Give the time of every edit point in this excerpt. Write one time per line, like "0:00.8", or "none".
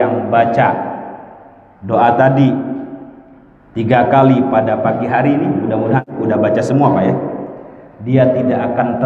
0:06.1